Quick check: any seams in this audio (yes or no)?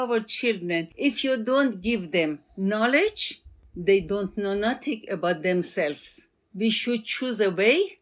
yes